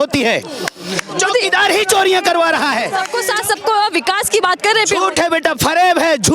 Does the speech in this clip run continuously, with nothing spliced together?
no; 1 cut; at 3.1 s

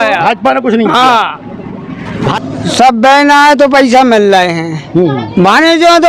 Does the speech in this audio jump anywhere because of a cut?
yes; 1 cut; at 2.3 s

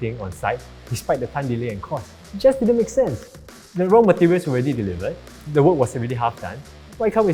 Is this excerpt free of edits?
no; 1 cut; at 2.2 s

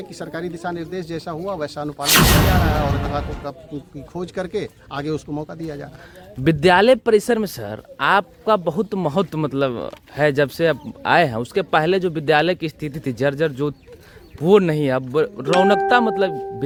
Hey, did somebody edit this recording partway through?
no; 0 cuts

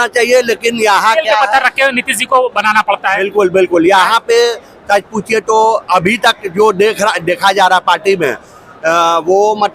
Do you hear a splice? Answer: no; 0 cuts

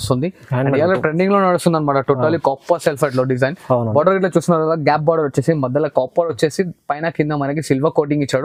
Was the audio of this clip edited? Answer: no; 0 cuts

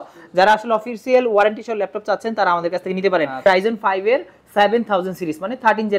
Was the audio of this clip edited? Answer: yes; 1 cut; at 3.4 s

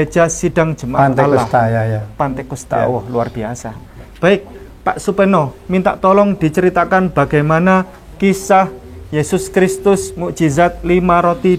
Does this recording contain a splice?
no; 0 cuts

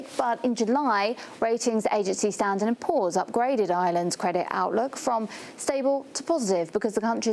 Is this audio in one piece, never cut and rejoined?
yes; 0 cuts

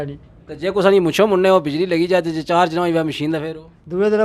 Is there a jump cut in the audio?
no; 0 cuts

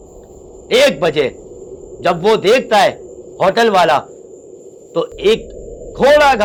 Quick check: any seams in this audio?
no; 0 cuts

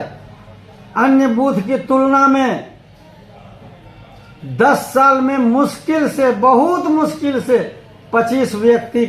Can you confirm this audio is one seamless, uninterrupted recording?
yes; 0 cuts

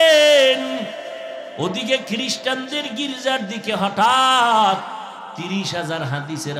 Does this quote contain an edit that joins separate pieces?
yes; 2 cuts; at 1.5 s, 5.3 s

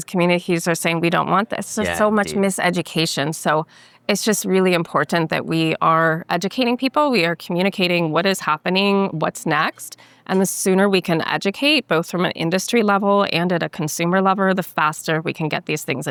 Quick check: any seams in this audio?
no; 0 cuts

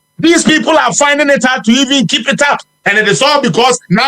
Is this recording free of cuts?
no; 1 cut; at 2.7 s

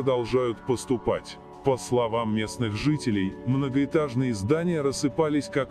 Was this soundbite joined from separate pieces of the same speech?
no; 0 cuts

